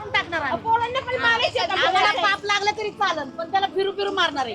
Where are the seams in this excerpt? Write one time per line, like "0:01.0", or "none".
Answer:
none

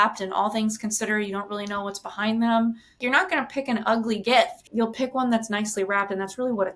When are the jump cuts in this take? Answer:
0:03.0
0:04.6

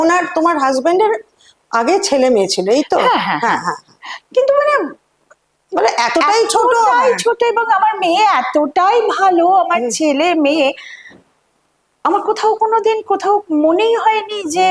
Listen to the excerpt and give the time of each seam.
none

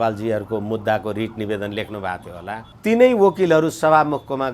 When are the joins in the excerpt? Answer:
0:02.7

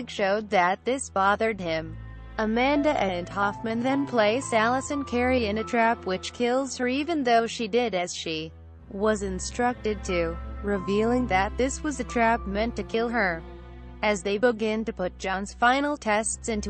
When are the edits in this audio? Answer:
0:04.1

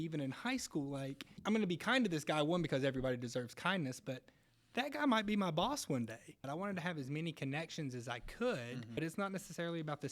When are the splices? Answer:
0:01.3
0:06.5
0:09.0

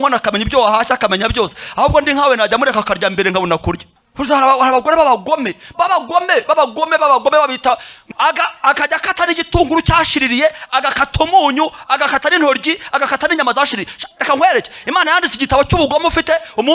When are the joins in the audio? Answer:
0:04.0
0:07.9

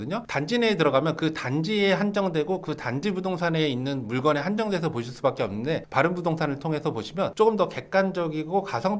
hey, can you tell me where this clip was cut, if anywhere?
none

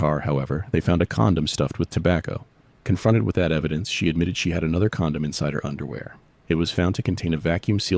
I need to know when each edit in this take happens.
none

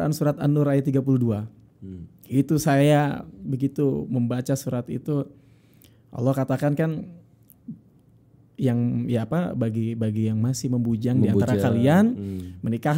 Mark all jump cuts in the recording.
none

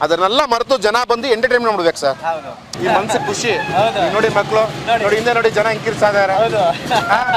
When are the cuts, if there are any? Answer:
0:02.7

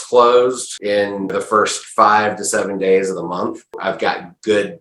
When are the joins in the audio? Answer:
0:01.1
0:03.7

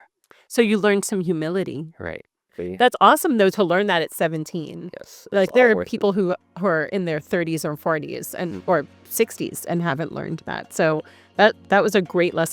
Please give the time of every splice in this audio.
0:02.6

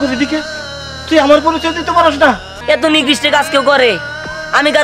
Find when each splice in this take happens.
0:02.5

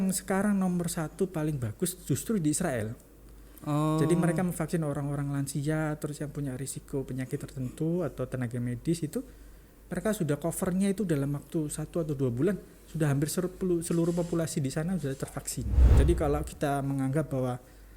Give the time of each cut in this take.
0:15.8

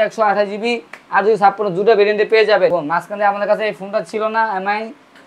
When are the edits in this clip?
0:02.8

